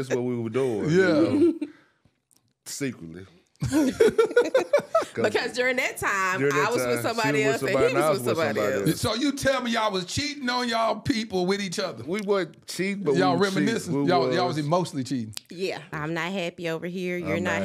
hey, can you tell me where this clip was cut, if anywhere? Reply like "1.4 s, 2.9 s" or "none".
15.9 s